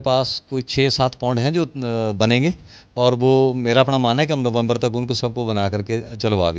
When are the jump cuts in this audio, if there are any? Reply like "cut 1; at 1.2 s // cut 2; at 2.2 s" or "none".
none